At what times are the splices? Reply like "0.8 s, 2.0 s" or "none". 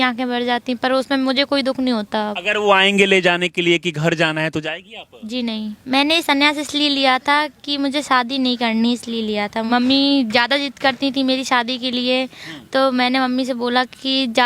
2.4 s, 5.7 s, 9.7 s